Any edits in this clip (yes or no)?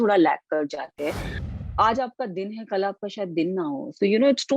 yes